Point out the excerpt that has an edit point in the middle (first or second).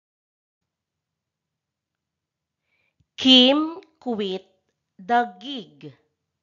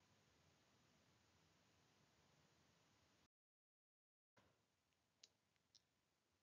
first